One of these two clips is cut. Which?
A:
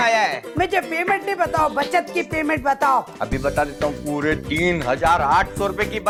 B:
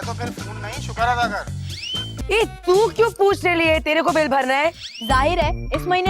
B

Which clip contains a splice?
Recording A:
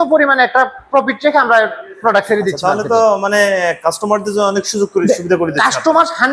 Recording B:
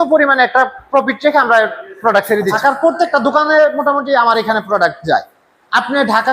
B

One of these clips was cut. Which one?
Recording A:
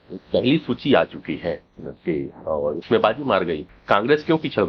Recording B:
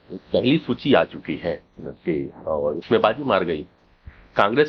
A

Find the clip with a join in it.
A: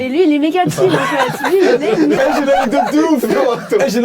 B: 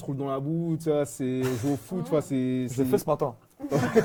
A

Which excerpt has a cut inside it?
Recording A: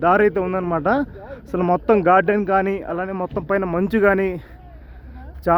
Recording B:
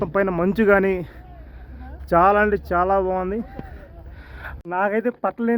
B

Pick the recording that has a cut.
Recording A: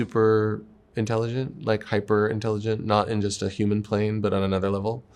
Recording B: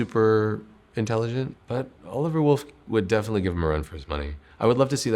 B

